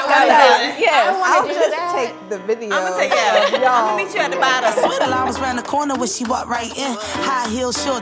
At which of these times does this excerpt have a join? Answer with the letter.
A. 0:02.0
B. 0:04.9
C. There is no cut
B